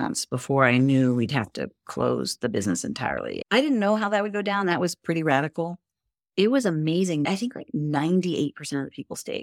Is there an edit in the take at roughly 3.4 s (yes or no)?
yes